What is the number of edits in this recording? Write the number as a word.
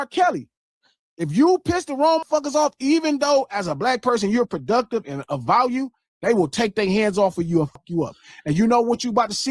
two